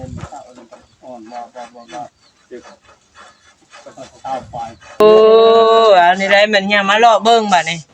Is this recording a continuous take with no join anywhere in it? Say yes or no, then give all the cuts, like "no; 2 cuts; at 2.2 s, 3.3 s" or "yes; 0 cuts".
no; 1 cut; at 5.0 s